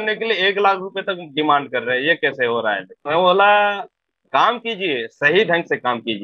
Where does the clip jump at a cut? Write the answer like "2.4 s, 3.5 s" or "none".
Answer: 2.9 s